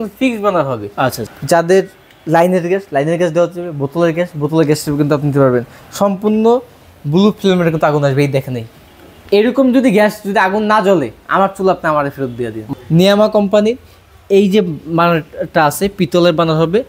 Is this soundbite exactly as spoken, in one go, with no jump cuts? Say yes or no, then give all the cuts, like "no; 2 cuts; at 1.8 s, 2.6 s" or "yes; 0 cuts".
no; 2 cuts; at 1.2 s, 12.6 s